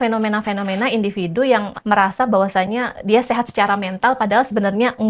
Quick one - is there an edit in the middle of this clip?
yes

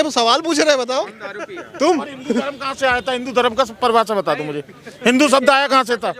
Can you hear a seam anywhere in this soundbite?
no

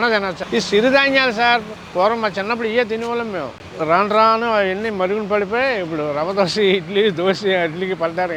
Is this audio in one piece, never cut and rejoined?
yes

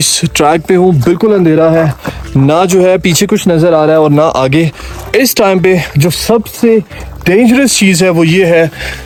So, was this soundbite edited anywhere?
no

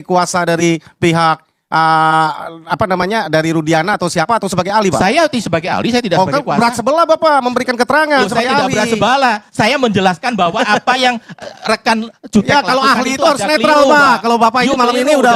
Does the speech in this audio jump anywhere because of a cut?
no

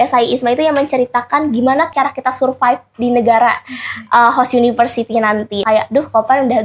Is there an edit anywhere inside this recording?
yes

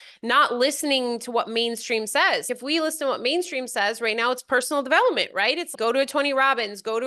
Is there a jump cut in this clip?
yes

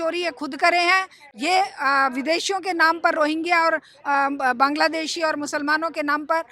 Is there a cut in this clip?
no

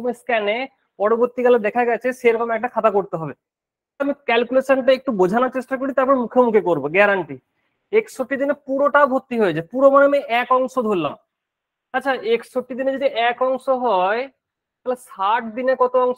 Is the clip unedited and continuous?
no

